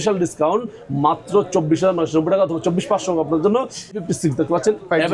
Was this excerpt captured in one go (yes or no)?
no